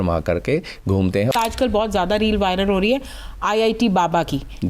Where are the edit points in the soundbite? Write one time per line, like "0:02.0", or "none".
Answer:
0:01.3